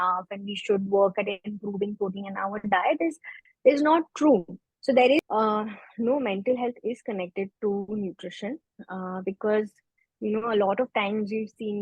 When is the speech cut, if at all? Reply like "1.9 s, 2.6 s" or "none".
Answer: 5.2 s